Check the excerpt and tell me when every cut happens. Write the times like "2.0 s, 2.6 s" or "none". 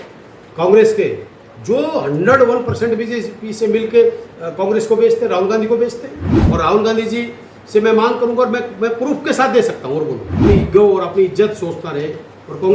6.4 s, 10.4 s